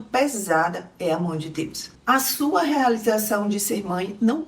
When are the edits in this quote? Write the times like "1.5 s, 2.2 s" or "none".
1.9 s